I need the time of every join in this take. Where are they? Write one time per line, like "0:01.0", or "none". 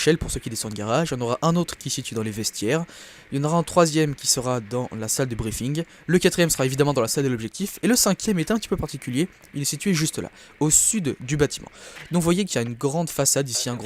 0:09.1